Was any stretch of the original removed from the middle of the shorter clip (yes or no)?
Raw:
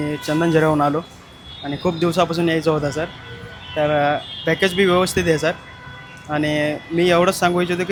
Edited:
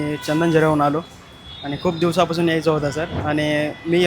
yes